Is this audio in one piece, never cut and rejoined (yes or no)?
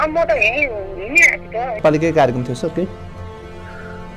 no